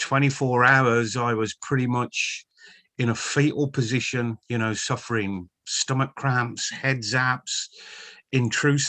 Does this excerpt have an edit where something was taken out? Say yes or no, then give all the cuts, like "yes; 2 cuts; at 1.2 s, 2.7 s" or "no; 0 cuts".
yes; 1 cut; at 4.4 s